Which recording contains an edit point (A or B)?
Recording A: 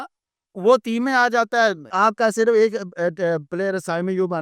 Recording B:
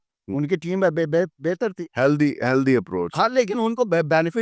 A